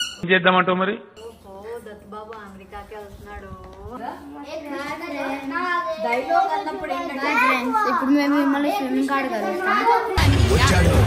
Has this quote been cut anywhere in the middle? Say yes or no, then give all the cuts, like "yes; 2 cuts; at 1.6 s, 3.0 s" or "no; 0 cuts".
yes; 1 cut; at 4.0 s